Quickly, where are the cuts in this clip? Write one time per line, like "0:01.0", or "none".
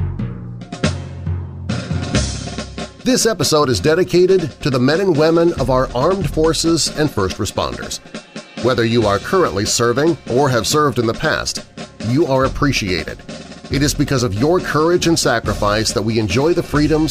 0:02.1